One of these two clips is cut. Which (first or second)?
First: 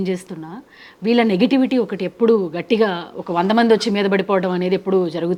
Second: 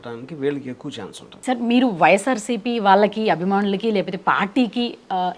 second